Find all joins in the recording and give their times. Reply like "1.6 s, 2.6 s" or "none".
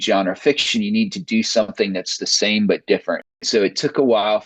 3.4 s

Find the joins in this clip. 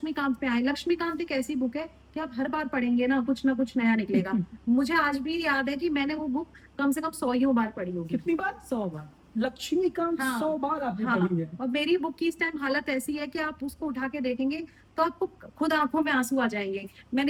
none

